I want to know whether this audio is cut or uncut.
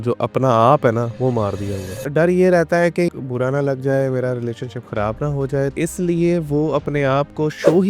cut